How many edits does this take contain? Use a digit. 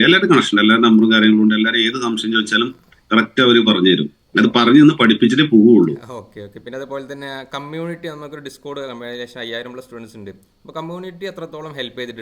0